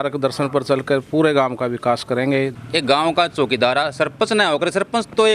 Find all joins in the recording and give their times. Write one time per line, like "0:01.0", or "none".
0:02.5